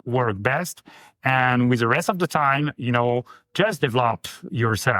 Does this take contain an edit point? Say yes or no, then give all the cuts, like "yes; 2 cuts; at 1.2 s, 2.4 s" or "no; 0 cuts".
no; 0 cuts